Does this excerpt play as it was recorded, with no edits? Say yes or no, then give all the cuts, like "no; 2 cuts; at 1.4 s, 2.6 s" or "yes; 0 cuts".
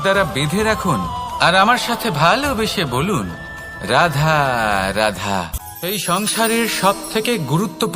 no; 1 cut; at 5.6 s